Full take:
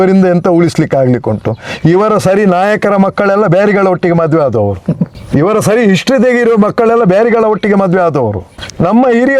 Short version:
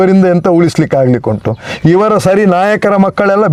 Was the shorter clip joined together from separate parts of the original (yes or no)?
no